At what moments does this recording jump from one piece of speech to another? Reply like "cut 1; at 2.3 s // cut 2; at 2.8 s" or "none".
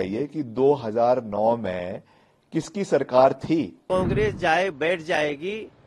cut 1; at 3.8 s